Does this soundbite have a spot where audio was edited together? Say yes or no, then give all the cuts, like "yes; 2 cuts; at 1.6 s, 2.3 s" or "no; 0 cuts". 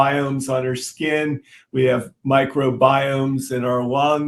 no; 0 cuts